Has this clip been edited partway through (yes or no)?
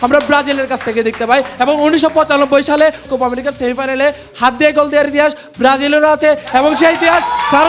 yes